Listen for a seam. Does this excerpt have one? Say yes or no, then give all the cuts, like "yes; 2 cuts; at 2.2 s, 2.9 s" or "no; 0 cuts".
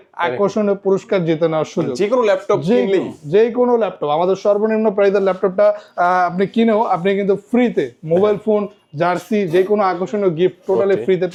no; 0 cuts